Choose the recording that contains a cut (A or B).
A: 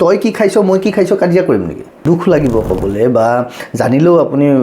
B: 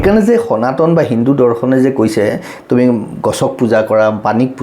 A